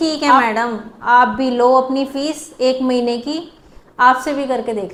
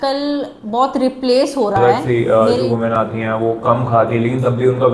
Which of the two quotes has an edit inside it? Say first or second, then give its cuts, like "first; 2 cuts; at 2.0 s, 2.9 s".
second; 1 cut; at 1.8 s